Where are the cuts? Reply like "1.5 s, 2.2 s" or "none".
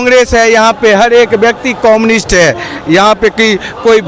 none